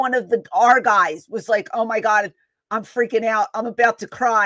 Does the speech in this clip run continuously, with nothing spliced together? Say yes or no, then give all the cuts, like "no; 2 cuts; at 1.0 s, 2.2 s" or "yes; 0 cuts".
yes; 0 cuts